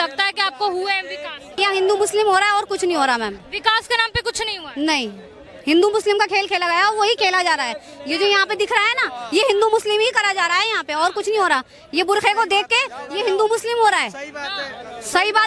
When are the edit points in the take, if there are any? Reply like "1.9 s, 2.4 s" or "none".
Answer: 1.6 s, 3.4 s